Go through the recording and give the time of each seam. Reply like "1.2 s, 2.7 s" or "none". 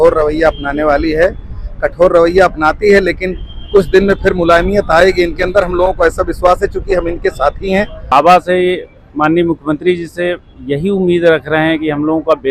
8.1 s